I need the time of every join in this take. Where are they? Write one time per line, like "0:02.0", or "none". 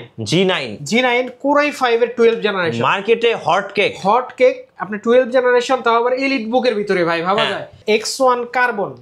0:07.8